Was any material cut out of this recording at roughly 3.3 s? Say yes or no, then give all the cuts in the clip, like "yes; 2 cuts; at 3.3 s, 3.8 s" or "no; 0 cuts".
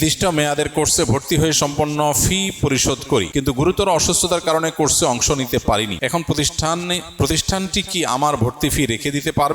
yes; 2 cuts; at 3.3 s, 5.9 s